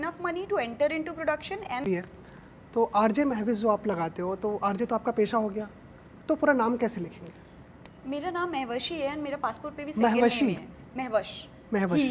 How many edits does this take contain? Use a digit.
1